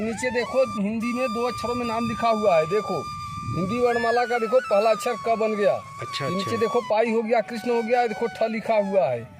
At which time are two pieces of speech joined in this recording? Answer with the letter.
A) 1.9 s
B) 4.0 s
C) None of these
C